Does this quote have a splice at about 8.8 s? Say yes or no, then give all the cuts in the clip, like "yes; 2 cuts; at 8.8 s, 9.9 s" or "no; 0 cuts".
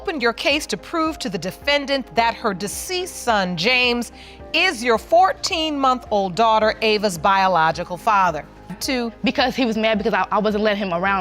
yes; 1 cut; at 8.8 s